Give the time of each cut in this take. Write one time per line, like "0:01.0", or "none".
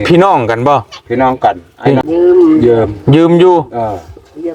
0:02.0